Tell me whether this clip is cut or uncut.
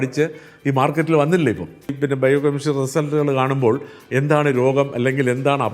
cut